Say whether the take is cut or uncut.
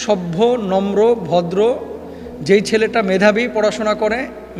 uncut